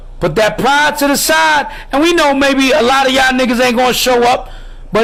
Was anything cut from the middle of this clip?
no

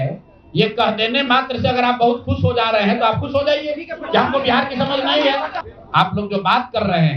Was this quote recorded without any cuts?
no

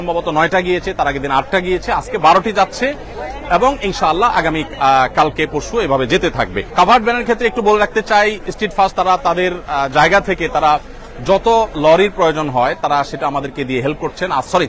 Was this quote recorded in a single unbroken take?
yes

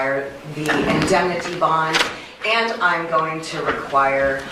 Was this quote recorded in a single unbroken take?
yes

